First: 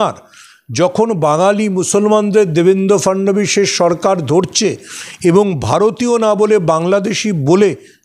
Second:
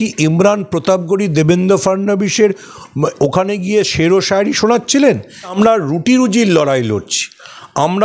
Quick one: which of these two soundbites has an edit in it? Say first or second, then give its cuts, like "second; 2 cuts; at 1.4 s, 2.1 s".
second; 1 cut; at 5.5 s